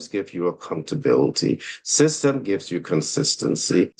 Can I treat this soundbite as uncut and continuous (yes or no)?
yes